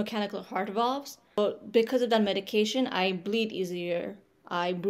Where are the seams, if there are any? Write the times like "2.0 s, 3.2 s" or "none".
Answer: 1.4 s